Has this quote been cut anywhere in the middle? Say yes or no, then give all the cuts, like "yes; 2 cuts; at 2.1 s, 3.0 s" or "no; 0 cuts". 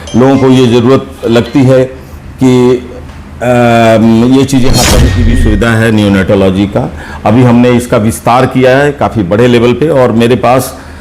yes; 1 cut; at 5.1 s